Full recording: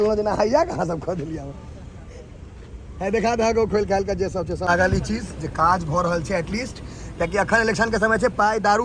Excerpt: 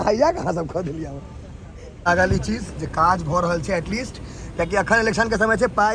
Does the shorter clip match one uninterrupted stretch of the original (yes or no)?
no